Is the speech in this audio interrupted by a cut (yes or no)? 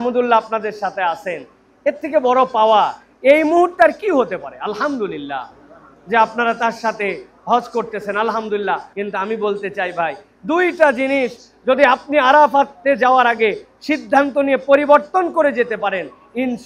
yes